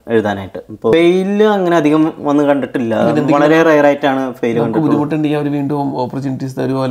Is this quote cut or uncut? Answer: cut